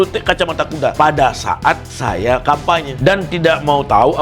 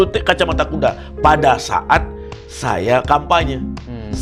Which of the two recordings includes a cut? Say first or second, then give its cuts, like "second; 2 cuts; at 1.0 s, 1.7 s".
first; 3 cuts; at 0.9 s, 1.9 s, 2.9 s